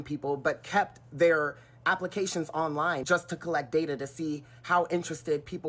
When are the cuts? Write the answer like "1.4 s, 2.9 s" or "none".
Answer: 3.0 s